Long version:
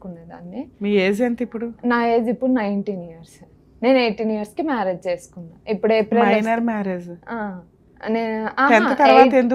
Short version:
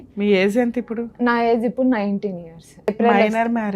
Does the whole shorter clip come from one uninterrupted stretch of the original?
no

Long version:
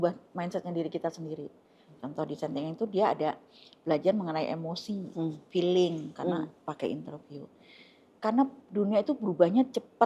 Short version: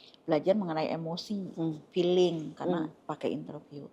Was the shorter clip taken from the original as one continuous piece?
yes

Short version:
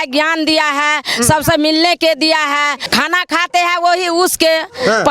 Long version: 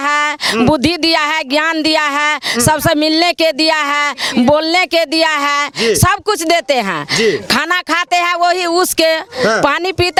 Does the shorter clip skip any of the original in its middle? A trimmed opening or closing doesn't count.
yes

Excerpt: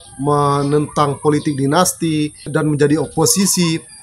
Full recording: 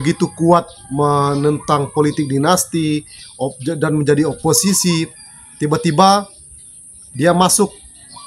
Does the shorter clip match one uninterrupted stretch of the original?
no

